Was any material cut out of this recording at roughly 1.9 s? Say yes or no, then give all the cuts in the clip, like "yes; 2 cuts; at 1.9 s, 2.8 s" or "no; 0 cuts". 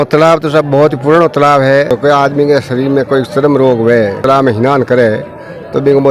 yes; 2 cuts; at 1.9 s, 4.2 s